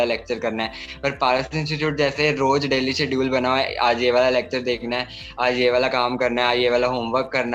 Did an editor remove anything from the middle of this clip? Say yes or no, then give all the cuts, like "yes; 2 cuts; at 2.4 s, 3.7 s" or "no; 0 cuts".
no; 0 cuts